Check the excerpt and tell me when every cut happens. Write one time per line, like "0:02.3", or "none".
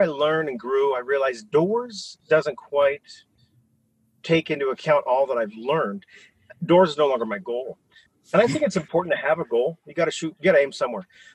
0:08.0

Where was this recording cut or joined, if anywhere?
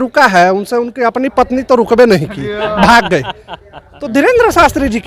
none

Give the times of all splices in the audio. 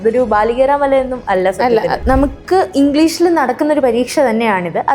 0:02.0

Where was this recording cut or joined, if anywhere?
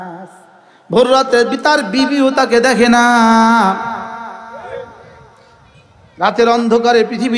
none

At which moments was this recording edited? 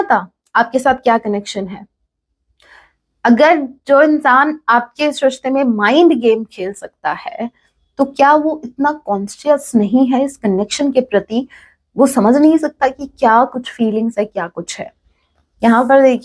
none

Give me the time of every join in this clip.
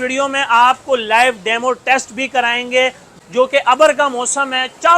0:03.1

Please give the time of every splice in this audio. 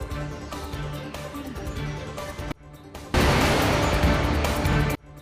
0:01.2

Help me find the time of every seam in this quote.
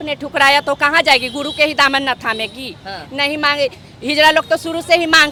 none

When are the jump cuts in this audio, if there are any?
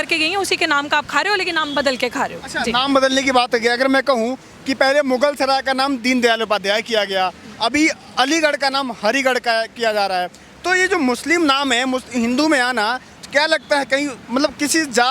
none

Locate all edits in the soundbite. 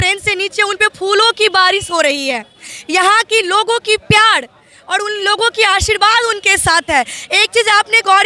none

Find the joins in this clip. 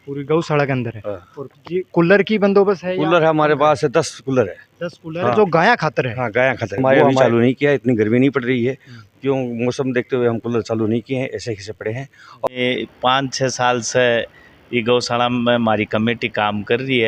0:07.0
0:12.5

